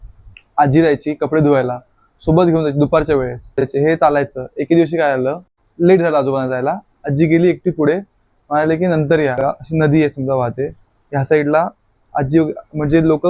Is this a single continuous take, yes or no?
no